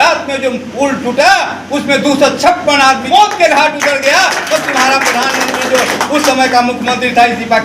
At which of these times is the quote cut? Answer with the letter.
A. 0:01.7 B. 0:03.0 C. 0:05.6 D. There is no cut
B